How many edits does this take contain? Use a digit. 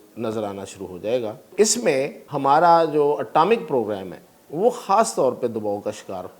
2